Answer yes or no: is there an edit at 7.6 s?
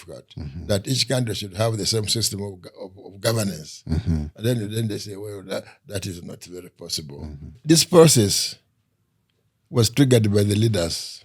yes